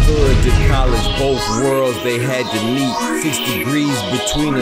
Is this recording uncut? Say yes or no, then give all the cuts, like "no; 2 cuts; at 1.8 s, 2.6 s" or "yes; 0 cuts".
yes; 0 cuts